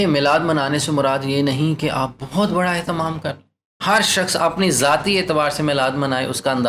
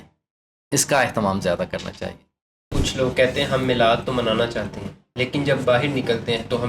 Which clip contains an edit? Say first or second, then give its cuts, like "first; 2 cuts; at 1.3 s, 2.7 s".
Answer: second; 1 cut; at 2.7 s